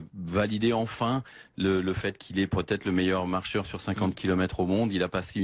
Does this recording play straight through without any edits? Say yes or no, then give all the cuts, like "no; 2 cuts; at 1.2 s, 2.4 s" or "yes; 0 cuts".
yes; 0 cuts